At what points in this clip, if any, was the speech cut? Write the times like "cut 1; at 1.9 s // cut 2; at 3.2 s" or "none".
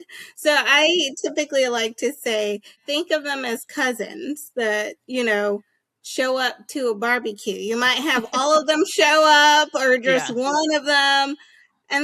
cut 1; at 2.8 s